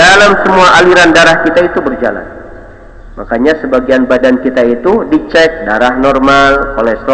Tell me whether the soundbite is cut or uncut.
uncut